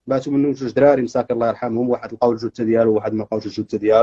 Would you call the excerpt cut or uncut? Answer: uncut